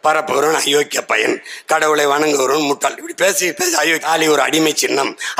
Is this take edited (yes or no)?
yes